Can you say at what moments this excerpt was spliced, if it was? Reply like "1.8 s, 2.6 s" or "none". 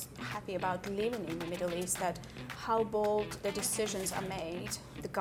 none